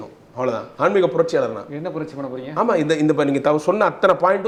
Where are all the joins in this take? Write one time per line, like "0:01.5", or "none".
none

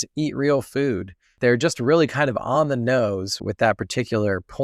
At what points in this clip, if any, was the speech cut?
0:01.3
0:03.4

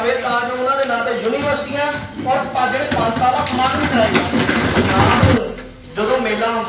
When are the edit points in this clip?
0:05.4

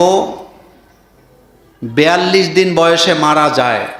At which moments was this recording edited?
none

